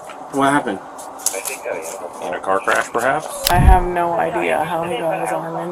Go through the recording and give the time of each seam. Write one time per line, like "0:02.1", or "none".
0:03.5